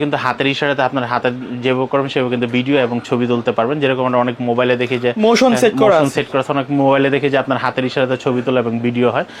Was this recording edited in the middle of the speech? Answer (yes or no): no